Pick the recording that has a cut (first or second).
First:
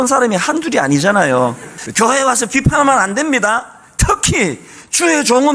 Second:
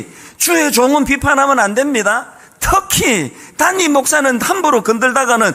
first